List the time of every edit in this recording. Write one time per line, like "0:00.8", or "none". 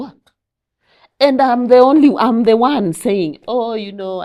none